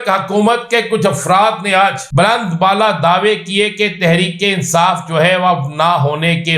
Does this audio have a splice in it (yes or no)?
yes